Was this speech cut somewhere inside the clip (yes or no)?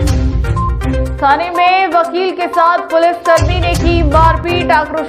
yes